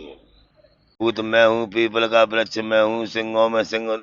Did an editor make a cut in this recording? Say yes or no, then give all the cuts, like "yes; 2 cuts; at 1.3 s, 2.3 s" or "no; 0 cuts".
yes; 1 cut; at 1.1 s